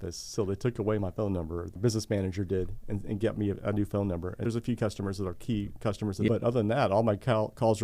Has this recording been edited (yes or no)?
yes